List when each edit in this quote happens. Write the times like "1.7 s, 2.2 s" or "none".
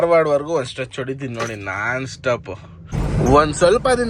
2.9 s

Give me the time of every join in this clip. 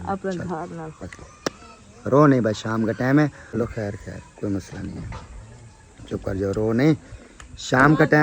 3.6 s

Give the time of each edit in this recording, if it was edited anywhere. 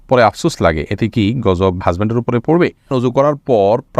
2.9 s

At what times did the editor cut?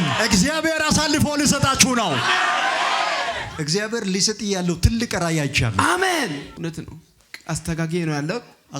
3.5 s, 6.5 s

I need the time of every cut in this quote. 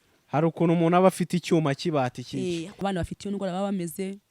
2.8 s

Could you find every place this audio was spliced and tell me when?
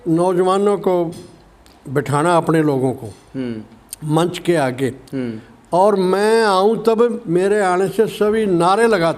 none

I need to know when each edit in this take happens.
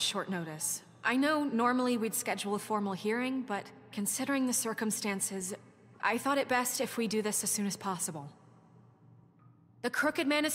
2.1 s

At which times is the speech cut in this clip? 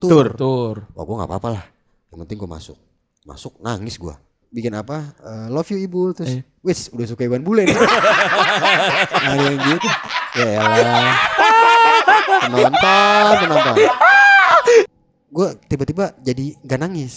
4.4 s, 14.8 s

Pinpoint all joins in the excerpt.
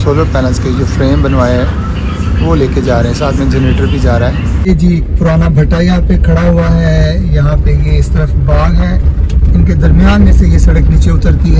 4.7 s

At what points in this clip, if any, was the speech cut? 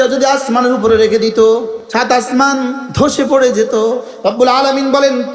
1.8 s, 2.8 s, 4.1 s

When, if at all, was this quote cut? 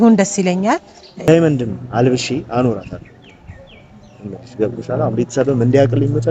1.2 s

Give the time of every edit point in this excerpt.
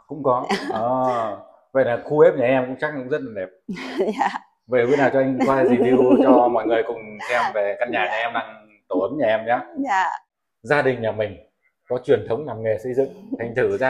10.3 s

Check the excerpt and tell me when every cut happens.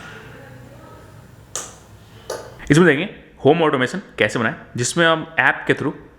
2.6 s

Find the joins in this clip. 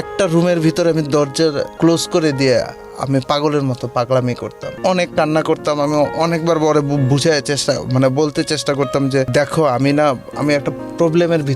1.7 s, 4.7 s, 9.3 s

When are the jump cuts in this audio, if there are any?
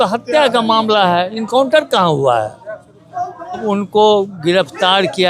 3.6 s

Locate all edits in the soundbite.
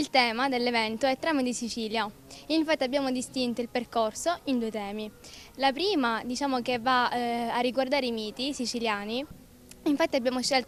none

